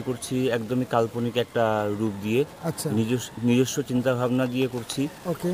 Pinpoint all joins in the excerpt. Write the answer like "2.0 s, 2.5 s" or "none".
none